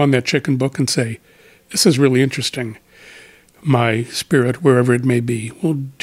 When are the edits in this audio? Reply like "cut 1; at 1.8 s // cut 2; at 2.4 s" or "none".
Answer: none